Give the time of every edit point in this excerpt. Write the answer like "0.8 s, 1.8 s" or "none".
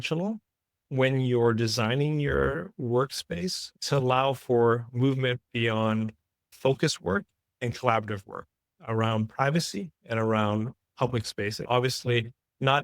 11.5 s